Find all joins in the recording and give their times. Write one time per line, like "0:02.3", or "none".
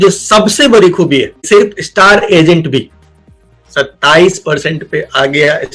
0:01.4